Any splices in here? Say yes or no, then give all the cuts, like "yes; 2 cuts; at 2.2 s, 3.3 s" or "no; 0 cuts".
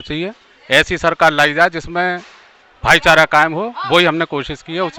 no; 0 cuts